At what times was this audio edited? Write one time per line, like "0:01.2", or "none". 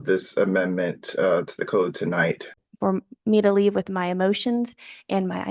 0:02.5